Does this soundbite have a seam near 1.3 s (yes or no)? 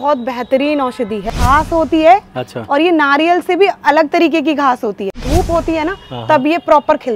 yes